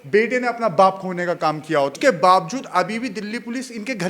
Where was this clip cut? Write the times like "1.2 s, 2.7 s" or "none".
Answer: 1.9 s